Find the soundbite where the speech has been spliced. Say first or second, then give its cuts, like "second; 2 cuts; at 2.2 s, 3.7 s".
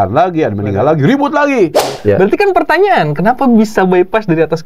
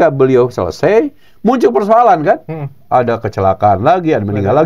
first; 1 cut; at 1.9 s